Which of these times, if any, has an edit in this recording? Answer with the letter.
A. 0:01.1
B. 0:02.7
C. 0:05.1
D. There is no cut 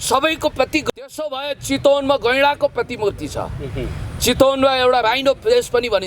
A